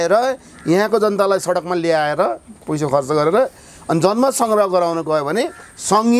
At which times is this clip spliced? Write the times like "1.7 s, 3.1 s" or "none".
none